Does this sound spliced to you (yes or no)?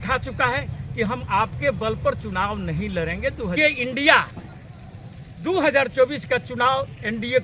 yes